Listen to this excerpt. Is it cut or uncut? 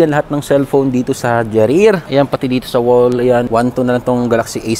cut